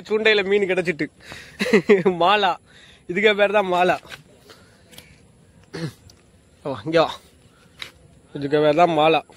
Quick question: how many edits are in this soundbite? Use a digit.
0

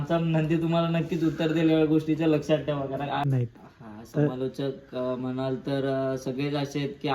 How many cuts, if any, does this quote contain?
1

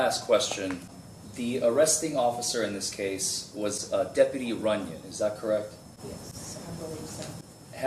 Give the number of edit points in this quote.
1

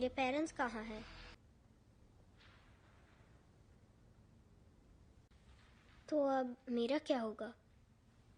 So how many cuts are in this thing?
1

